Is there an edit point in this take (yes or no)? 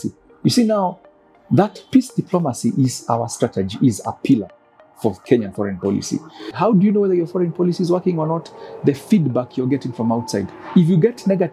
yes